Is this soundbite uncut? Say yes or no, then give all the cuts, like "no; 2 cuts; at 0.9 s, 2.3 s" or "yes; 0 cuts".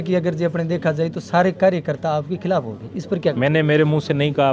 no; 1 cut; at 3.4 s